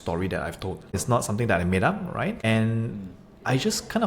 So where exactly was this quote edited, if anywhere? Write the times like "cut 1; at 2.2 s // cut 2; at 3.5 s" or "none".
cut 1; at 1.0 s // cut 2; at 2.4 s